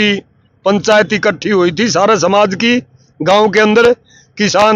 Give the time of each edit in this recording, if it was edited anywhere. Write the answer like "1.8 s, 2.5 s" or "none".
none